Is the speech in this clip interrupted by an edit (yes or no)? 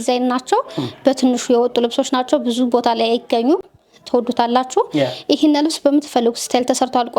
no